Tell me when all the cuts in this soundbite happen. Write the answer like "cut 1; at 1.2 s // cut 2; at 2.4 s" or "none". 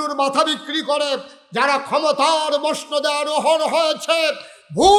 none